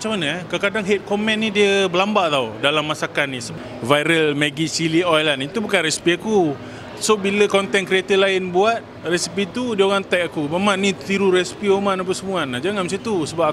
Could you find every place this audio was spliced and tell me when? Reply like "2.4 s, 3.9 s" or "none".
3.4 s